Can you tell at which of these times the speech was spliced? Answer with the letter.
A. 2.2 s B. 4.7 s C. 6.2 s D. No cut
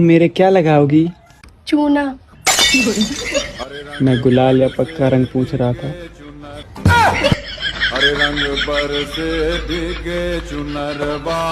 D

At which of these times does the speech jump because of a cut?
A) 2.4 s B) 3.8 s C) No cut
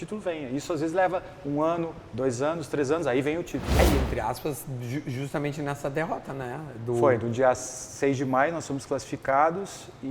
B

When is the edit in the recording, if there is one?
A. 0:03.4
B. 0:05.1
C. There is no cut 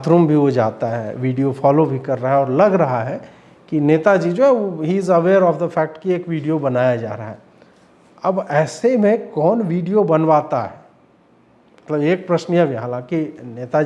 C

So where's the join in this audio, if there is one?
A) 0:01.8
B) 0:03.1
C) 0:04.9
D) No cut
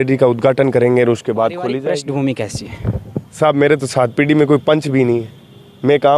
A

